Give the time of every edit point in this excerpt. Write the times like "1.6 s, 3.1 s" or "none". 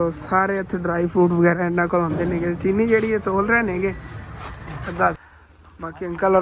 5.2 s

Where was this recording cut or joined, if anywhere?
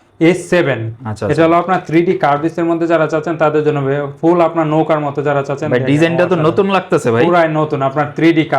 none

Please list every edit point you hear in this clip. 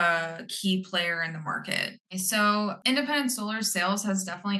2.0 s, 2.8 s

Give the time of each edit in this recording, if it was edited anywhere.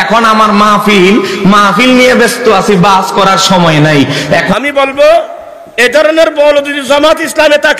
4.5 s

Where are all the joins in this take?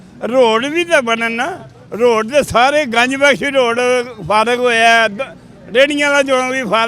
none

